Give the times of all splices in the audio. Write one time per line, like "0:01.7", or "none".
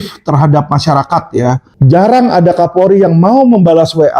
0:01.7